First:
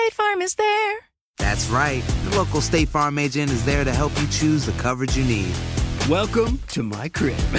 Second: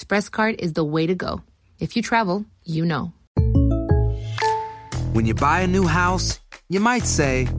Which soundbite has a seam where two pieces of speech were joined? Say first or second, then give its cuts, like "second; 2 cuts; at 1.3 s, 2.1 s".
second; 1 cut; at 3.2 s